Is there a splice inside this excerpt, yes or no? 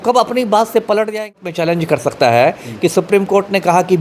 yes